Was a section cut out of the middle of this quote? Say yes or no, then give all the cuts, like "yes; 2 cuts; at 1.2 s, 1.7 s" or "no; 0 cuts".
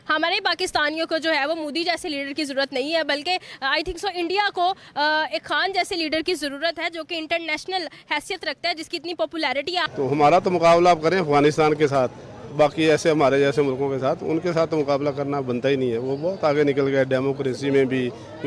yes; 1 cut; at 9.8 s